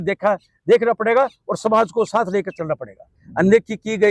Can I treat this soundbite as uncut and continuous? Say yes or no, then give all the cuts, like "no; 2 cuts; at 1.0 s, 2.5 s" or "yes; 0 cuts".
yes; 0 cuts